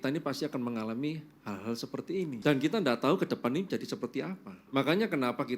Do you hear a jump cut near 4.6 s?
yes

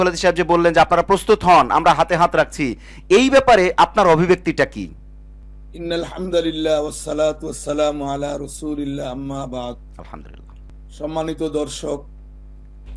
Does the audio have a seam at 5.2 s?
no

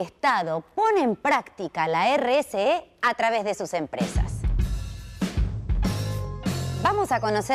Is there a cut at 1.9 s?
yes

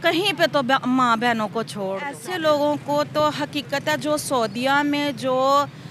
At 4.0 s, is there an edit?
no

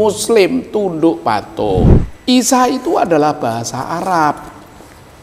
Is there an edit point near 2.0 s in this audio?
yes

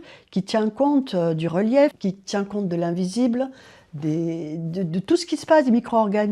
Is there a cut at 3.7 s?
no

